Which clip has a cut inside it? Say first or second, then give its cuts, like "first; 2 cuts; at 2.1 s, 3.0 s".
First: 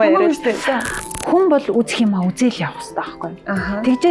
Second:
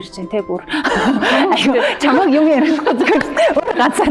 first; 1 cut; at 0.9 s